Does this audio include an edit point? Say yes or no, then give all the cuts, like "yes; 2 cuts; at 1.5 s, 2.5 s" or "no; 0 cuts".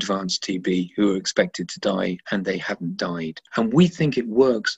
yes; 1 cut; at 3.4 s